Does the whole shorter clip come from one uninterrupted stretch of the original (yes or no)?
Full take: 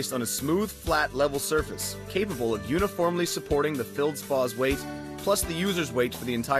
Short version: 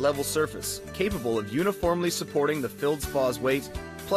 yes